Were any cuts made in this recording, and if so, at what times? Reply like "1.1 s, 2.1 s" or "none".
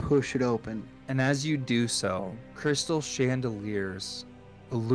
0.9 s, 2.4 s